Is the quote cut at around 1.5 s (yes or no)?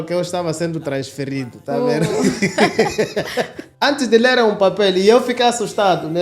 no